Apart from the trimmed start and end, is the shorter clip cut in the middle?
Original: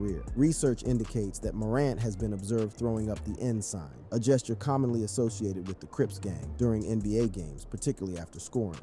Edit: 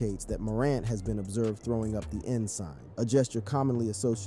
no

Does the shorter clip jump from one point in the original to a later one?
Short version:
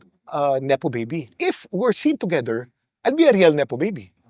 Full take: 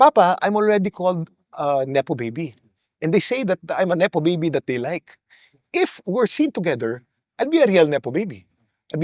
yes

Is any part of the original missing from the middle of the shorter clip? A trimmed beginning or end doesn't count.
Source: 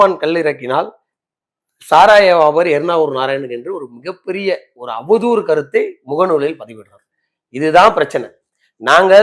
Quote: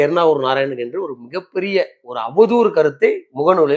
no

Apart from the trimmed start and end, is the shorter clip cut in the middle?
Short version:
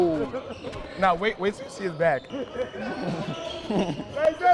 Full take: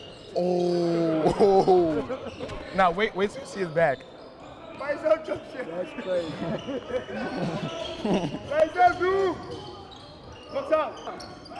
yes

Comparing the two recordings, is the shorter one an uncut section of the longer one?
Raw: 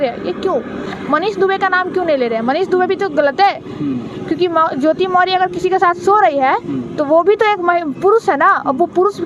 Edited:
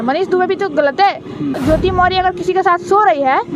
no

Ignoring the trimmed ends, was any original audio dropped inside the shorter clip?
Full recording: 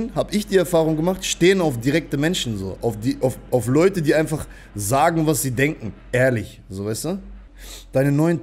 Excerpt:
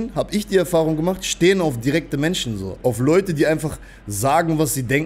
yes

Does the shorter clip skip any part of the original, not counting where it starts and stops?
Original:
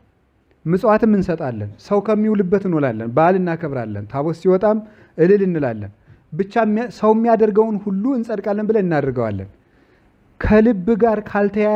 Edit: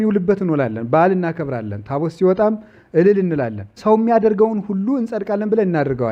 yes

